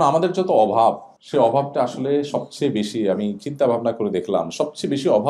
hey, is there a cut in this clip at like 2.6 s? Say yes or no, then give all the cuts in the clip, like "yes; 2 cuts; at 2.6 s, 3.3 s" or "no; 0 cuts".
no; 1 cut; at 1.1 s